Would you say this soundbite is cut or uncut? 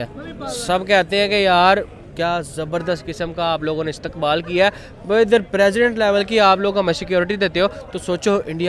uncut